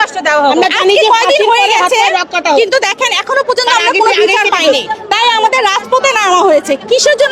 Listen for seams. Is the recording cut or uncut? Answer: cut